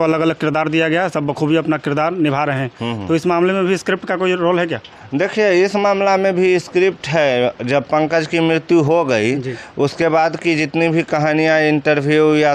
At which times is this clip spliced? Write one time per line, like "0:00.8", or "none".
none

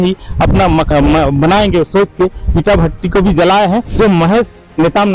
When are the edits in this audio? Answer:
0:03.9

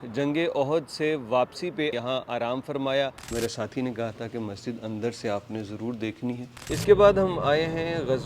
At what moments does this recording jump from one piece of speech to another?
0:01.9
0:03.2
0:06.7

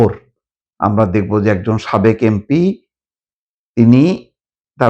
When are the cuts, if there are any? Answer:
none

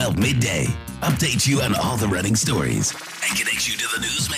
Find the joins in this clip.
none

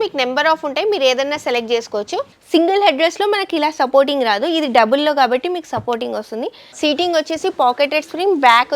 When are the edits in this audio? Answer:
0:02.4
0:06.6

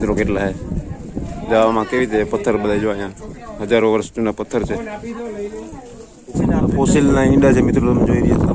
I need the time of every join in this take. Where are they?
0:01.3
0:06.4

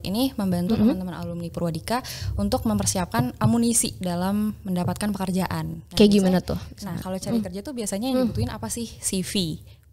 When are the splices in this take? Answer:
none

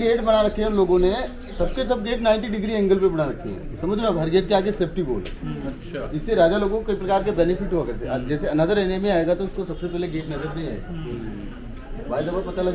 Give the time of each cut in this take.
none

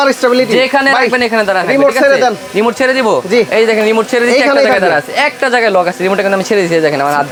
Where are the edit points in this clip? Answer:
none

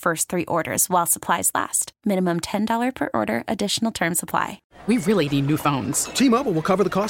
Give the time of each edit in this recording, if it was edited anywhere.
0:04.7

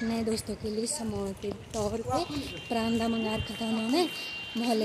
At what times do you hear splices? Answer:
none

